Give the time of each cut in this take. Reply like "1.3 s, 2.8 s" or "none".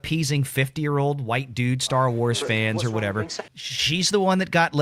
3.4 s